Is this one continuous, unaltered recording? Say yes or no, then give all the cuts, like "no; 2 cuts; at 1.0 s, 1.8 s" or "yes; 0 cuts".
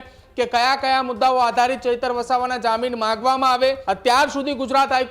no; 1 cut; at 3.8 s